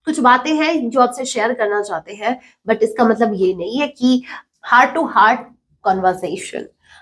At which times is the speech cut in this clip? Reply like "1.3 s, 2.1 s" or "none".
4.4 s